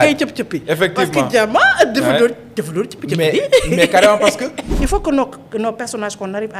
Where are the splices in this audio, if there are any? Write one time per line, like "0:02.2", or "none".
0:04.6